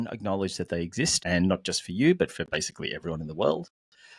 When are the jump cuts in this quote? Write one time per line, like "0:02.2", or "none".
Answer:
0:01.2